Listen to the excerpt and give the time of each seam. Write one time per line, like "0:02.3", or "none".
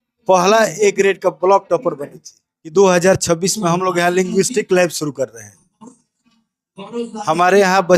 0:02.7